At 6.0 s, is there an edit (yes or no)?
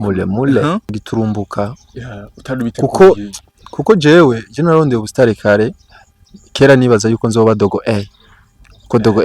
no